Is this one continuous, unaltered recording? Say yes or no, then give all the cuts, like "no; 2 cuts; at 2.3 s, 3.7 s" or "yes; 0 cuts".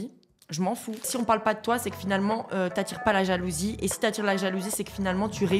no; 1 cut; at 1.1 s